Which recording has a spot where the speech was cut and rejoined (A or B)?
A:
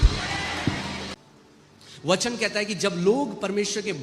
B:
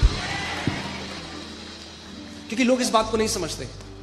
A